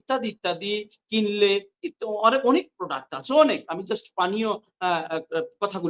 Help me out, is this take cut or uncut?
uncut